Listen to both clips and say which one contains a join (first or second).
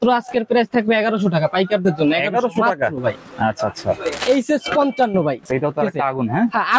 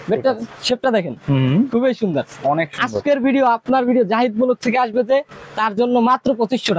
first